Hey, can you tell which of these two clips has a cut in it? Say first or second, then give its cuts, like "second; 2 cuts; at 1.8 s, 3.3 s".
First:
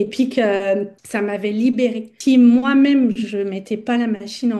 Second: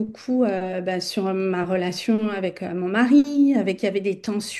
first; 1 cut; at 2.1 s